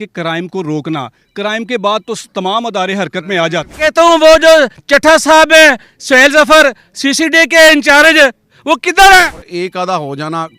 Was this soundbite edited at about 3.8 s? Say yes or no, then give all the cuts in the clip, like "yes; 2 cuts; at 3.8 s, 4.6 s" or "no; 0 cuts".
yes; 2 cuts; at 3.8 s, 9.3 s